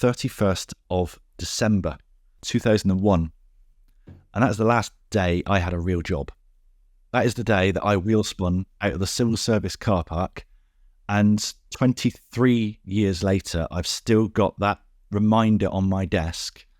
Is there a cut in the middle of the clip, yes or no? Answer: yes